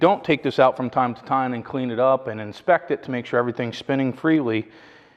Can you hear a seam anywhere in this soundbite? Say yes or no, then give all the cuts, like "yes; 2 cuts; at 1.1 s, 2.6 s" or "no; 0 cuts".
no; 0 cuts